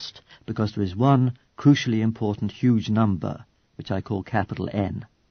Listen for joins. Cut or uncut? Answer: uncut